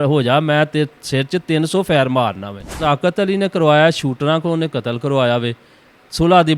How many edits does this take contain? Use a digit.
1